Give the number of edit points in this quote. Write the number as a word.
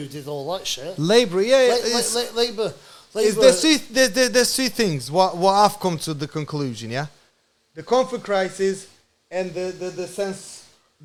zero